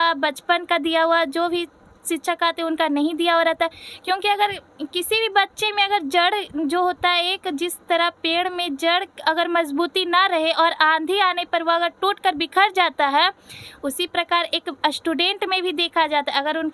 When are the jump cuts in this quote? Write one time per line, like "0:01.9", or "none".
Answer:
none